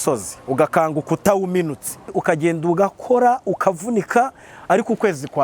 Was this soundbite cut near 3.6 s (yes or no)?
no